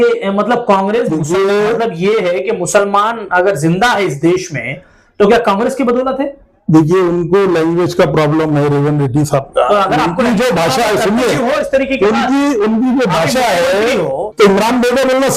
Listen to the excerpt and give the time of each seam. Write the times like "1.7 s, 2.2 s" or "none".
14.3 s